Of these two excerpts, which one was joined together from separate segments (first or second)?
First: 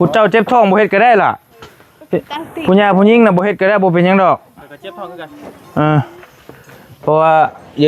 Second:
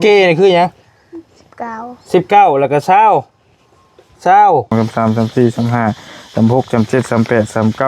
second